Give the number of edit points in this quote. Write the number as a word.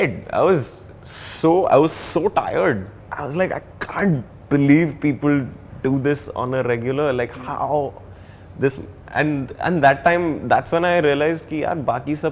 one